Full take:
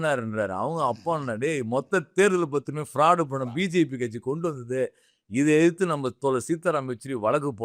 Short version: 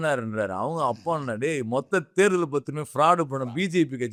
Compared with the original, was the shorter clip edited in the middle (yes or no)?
no